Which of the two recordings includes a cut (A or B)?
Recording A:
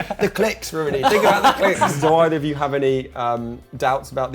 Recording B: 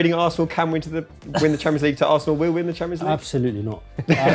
A